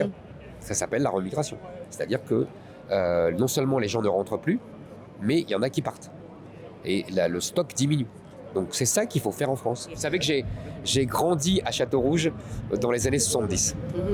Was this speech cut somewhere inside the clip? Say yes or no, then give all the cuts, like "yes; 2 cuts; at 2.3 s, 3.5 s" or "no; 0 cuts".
yes; 1 cut; at 10.0 s